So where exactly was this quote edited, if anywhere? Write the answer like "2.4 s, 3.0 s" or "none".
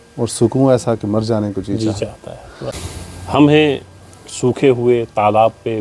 2.9 s